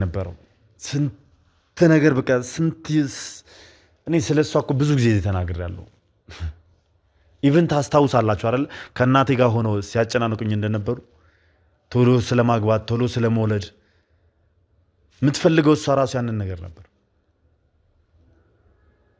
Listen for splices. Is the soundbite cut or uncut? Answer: uncut